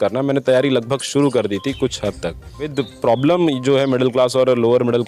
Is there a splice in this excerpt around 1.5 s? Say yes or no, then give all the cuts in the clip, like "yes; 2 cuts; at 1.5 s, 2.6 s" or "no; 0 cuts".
no; 1 cut; at 2.7 s